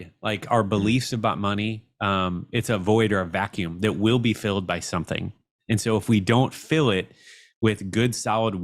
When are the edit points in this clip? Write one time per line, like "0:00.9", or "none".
none